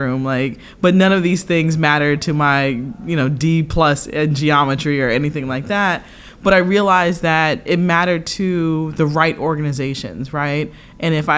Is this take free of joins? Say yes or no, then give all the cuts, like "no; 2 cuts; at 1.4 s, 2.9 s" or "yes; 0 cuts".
yes; 0 cuts